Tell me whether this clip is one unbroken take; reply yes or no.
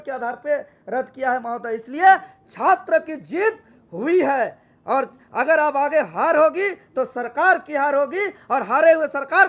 yes